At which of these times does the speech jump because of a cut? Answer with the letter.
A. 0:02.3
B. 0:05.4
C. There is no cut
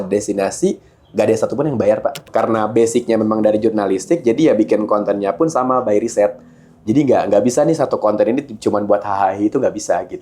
A